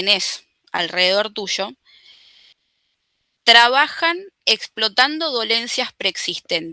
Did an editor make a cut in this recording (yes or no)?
no